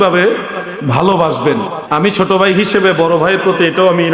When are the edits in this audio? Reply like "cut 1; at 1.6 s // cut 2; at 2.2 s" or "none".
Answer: cut 1; at 1.8 s